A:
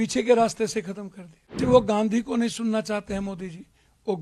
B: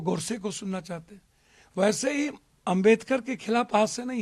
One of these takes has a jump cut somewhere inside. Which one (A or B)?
A